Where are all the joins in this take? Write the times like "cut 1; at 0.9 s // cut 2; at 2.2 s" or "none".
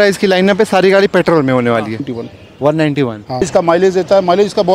cut 1; at 2.2 s // cut 2; at 3.4 s